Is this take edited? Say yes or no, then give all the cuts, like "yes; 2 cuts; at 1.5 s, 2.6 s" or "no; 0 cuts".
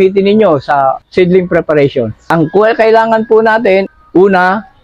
yes; 3 cuts; at 1.0 s, 2.2 s, 3.9 s